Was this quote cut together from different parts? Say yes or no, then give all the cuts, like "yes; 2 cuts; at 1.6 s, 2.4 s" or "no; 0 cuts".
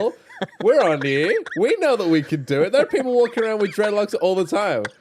no; 0 cuts